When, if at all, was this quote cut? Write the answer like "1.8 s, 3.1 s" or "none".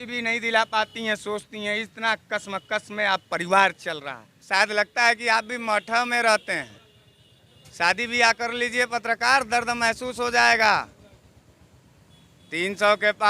4.4 s